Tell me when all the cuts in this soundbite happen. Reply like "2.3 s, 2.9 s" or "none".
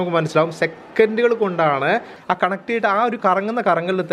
2.1 s